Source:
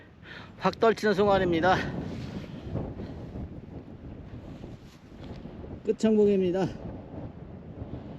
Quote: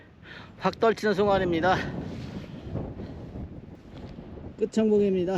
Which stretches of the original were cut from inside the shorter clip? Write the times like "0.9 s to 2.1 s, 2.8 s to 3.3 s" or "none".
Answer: 3.7 s to 5.0 s